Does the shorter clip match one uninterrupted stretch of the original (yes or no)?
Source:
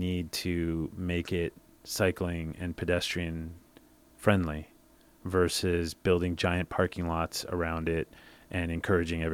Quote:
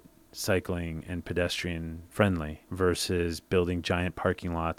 no